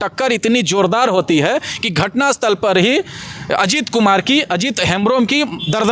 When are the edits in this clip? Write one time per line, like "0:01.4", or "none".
none